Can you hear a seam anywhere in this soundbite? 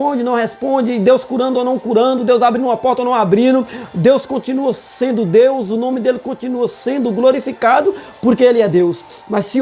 no; 0 cuts

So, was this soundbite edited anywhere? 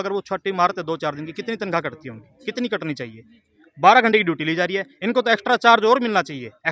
no; 0 cuts

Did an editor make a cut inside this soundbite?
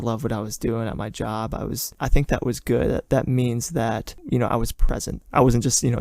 yes; 3 cuts; at 1.9 s, 4.1 s, 5.1 s

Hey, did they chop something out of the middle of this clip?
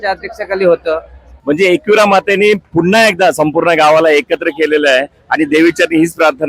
yes; 1 cut; at 1.3 s

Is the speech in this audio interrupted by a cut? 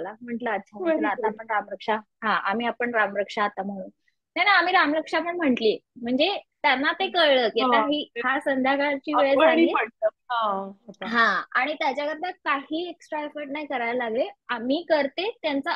no; 0 cuts

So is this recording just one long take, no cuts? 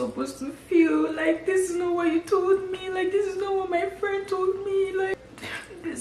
no; 1 cut; at 5.1 s

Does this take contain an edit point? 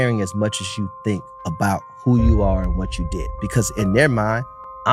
no; 0 cuts

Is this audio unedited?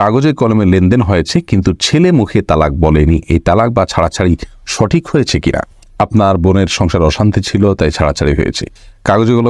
yes; 0 cuts

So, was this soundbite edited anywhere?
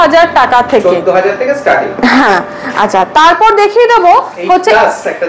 no; 0 cuts

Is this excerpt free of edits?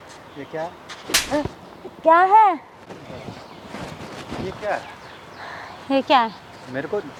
yes; 0 cuts

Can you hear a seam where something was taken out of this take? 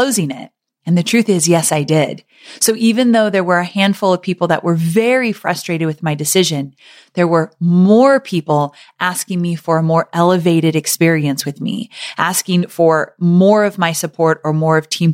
no; 0 cuts

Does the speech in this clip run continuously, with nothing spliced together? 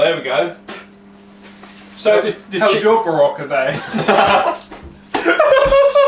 yes; 0 cuts

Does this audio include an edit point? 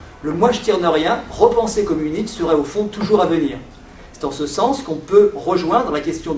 no; 0 cuts

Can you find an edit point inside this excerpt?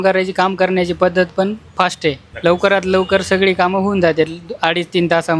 yes; 1 cut; at 2.3 s

